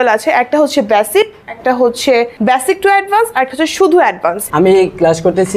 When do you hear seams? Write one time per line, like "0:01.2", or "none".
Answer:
0:02.3
0:04.4

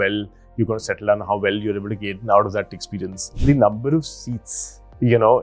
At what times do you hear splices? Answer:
0:03.2

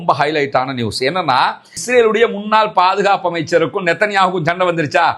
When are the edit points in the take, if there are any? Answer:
0:01.7

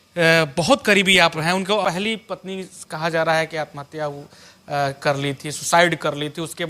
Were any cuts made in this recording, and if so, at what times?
0:01.8

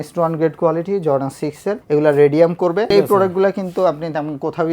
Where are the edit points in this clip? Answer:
0:02.9

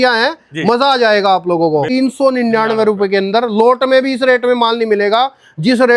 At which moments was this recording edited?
0:01.9

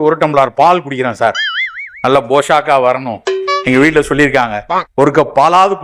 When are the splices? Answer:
none

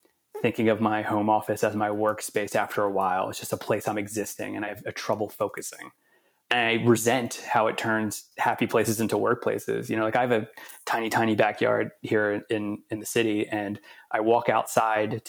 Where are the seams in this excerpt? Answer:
0:04.7
0:06.5

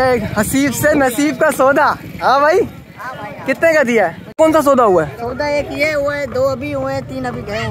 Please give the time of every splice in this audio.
0:04.2

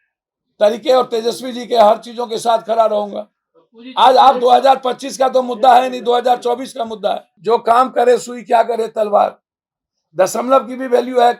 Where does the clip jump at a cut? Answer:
0:07.3

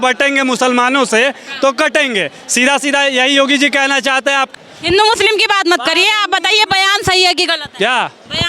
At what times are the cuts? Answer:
0:04.7

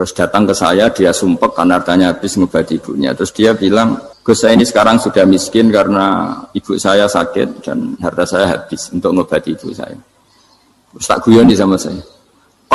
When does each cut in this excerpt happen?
0:04.1

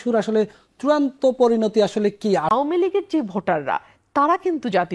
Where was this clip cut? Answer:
0:02.5

